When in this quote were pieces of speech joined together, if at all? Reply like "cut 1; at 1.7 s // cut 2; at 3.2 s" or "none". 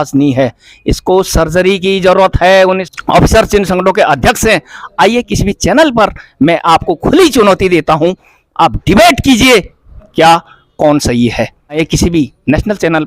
cut 1; at 2.9 s // cut 2; at 11.8 s